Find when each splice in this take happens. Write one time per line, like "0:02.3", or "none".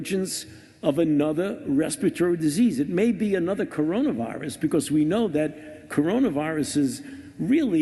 none